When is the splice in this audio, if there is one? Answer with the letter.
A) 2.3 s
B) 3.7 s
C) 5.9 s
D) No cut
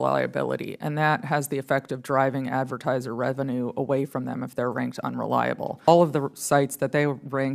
C